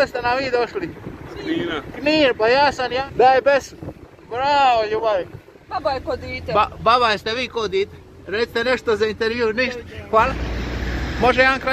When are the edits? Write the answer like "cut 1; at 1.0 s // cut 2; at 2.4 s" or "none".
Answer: cut 1; at 3.1 s // cut 2; at 5.6 s // cut 3; at 10.3 s